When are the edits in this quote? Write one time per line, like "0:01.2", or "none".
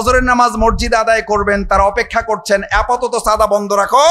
none